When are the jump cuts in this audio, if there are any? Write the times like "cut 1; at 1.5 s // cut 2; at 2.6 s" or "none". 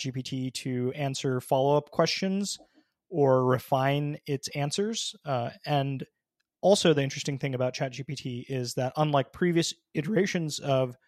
none